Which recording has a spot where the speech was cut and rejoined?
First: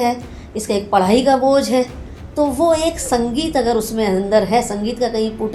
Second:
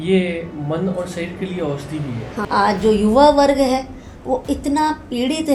second; 1 cut; at 2.4 s

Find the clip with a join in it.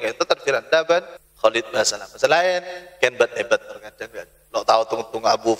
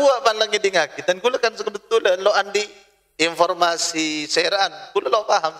first; 1 cut; at 1.2 s

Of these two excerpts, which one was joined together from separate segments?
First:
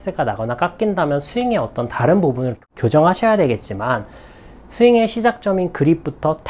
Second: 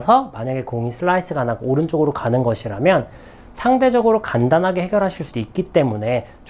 first; 1 cut; at 2.6 s

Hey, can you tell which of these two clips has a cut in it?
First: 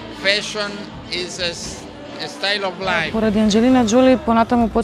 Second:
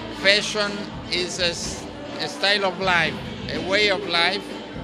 first; 1 cut; at 3.1 s

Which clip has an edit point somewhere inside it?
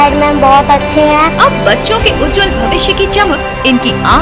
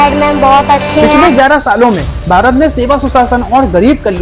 second; 1 cut; at 1.2 s

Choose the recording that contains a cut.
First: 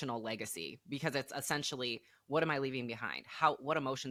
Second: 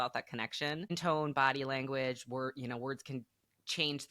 second; 1 cut; at 0.9 s

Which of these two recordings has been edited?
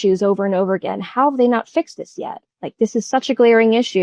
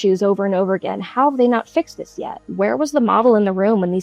second; 1 cut; at 2.5 s

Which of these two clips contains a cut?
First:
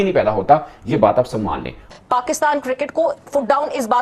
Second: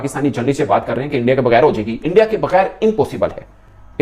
first; 1 cut; at 1.9 s

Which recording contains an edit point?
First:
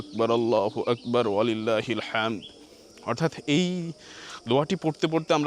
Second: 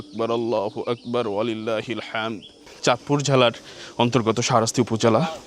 second; 1 cut; at 2.6 s

